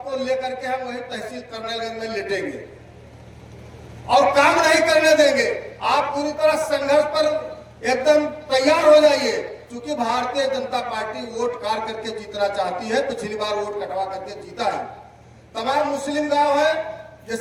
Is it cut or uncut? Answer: uncut